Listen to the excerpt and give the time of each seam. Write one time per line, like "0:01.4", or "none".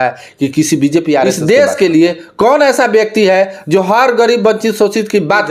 0:01.4